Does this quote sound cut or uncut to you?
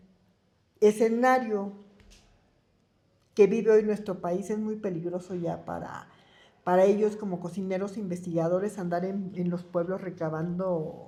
uncut